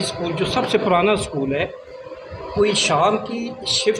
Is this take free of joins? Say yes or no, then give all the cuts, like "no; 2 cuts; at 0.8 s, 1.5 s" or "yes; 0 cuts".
yes; 0 cuts